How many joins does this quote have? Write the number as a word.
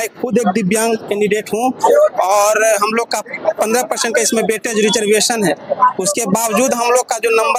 zero